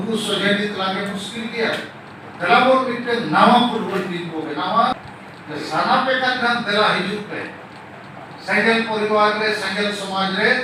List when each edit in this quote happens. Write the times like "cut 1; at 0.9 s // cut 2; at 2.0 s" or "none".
cut 1; at 4.9 s